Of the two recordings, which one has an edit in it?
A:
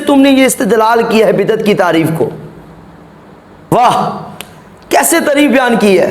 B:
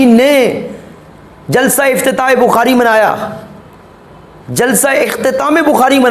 A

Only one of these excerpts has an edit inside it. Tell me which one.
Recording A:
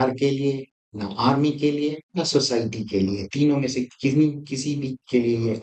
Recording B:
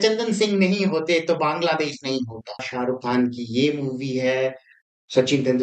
B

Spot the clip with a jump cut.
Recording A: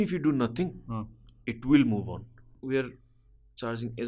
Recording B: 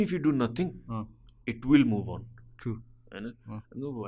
A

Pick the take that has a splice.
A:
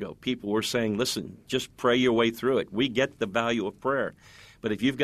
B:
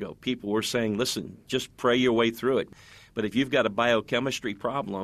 B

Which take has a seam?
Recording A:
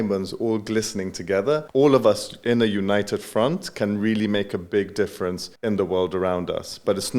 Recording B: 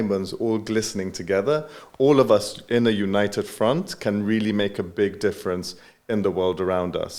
A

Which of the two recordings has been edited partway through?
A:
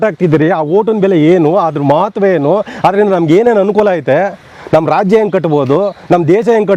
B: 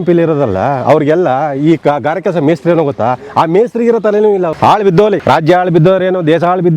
B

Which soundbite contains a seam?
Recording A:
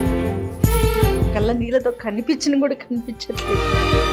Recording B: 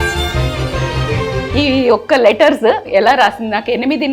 B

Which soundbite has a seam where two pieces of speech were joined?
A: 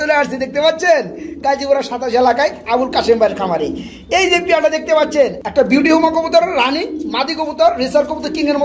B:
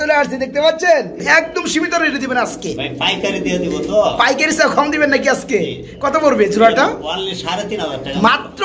B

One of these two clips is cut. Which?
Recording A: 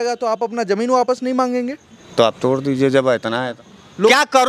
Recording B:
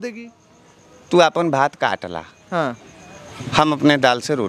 A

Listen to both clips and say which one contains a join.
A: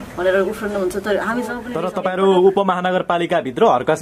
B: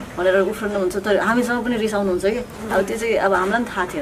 A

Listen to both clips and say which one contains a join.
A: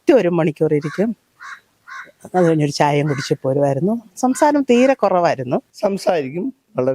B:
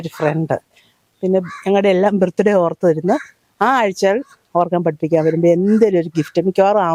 A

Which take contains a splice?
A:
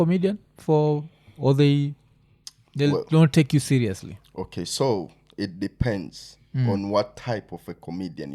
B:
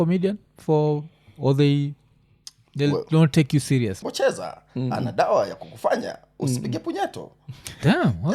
B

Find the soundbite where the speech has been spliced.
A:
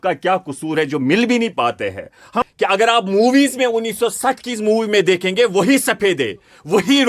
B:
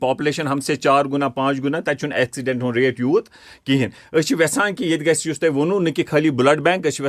A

